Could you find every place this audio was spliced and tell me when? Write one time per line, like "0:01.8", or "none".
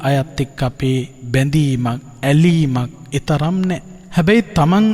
0:02.1
0:03.0
0:04.0

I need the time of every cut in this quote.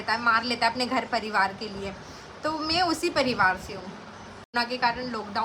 0:04.5

